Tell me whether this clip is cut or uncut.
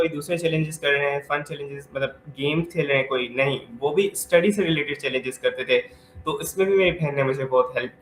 uncut